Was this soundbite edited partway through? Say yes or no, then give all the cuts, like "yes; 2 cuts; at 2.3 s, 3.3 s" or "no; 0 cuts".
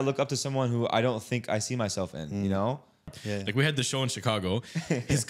yes; 1 cut; at 3.2 s